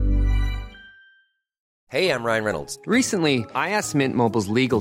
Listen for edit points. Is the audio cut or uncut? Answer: cut